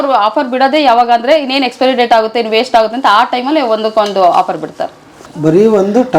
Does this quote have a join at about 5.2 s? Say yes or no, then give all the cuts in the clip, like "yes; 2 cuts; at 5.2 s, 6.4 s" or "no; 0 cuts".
yes; 1 cut; at 5.2 s